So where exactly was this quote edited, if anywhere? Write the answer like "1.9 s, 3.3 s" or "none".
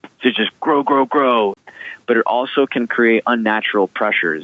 1.6 s